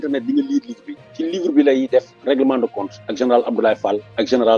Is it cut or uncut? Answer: uncut